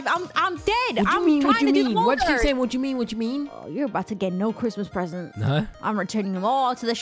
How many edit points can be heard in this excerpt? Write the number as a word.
zero